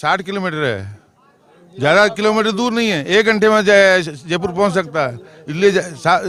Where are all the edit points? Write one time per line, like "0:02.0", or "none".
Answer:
none